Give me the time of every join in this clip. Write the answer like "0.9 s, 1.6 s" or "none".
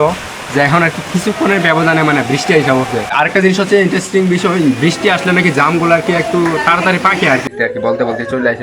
3.1 s, 7.5 s